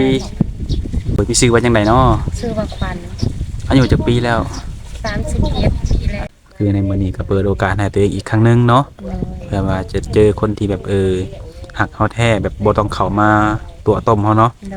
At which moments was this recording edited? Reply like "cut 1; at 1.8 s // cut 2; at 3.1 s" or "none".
cut 1; at 1.2 s // cut 2; at 6.2 s